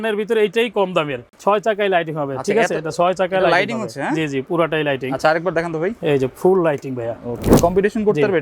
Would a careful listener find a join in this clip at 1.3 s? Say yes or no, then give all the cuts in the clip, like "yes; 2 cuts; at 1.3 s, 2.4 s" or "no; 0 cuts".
yes; 2 cuts; at 1.3 s, 7.5 s